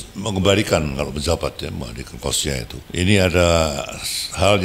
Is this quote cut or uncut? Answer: cut